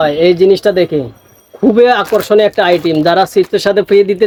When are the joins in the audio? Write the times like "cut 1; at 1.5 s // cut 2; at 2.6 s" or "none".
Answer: none